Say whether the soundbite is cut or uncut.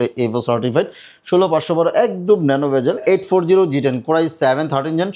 cut